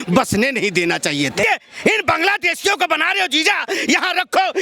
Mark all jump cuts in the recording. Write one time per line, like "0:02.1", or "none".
0:01.4